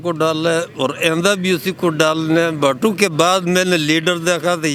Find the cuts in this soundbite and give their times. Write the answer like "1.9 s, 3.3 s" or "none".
none